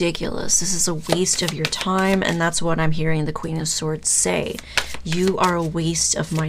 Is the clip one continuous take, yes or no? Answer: yes